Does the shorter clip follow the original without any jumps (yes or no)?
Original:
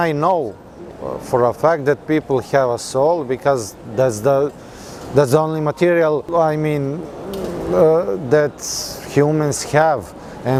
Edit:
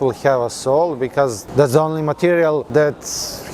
no